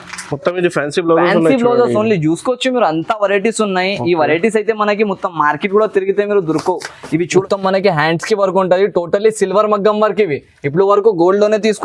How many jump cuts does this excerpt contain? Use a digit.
1